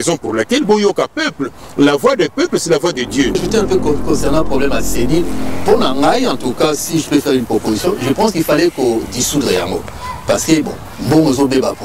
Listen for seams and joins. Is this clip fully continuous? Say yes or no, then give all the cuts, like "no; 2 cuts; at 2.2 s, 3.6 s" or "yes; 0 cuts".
no; 1 cut; at 3.4 s